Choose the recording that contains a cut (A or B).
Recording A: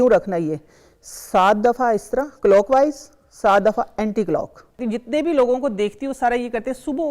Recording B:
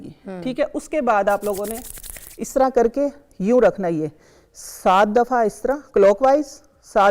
A